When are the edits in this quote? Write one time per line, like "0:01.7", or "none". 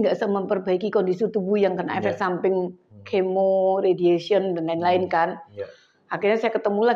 none